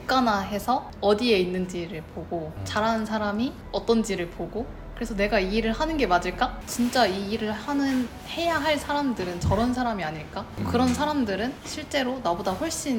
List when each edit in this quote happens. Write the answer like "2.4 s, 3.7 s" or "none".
0.9 s, 6.6 s